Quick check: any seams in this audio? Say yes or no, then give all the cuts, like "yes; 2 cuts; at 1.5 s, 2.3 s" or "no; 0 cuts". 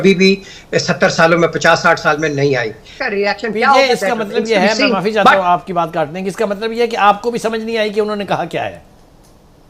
yes; 1 cut; at 2.9 s